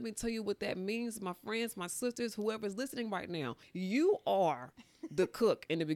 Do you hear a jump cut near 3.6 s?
yes; 1 cut; at 3.6 s

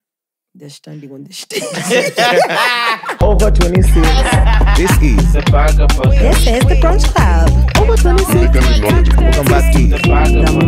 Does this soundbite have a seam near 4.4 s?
no; 1 cut; at 3.2 s

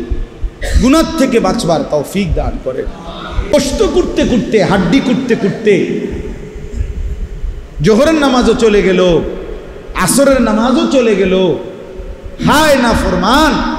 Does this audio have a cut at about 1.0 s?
no; 1 cut; at 3.3 s

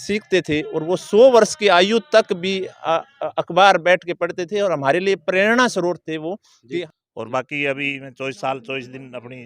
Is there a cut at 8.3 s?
no; 1 cut; at 6.8 s

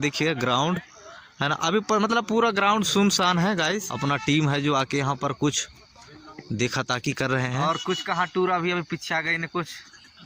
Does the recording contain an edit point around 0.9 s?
no; 2 cuts; at 3.9 s, 7.6 s

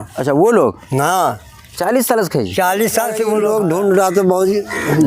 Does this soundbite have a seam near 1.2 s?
no; 1 cut; at 3.3 s

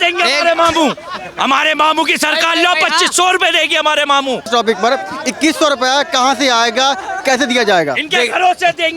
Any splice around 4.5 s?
yes; 1 cut; at 4.5 s

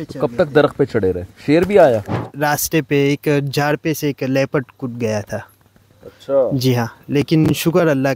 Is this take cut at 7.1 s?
no; 1 cut; at 2.2 s

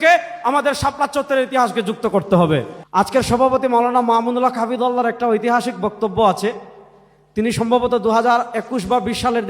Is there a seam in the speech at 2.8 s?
yes; 1 cut; at 2.8 s

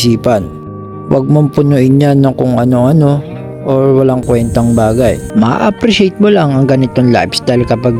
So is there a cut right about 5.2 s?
yes; 1 cut; at 5.2 s

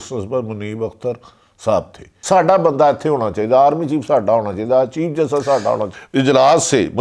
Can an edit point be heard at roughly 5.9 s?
yes; 2 cuts; at 2.1 s, 5.9 s

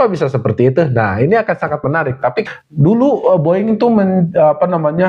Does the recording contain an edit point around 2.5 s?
yes; 1 cut; at 2.5 s

